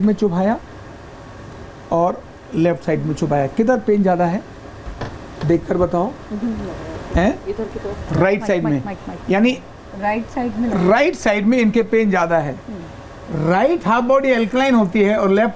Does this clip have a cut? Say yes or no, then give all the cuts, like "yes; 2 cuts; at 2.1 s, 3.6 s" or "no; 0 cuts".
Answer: no; 0 cuts